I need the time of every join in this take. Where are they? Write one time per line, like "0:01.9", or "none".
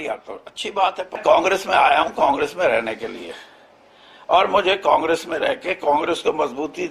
0:01.1